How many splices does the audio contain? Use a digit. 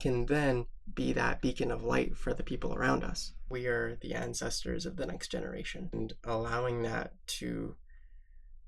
2